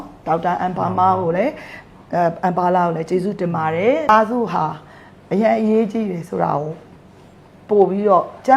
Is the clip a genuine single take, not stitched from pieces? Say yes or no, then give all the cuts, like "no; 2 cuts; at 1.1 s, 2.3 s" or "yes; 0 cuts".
no; 1 cut; at 4.1 s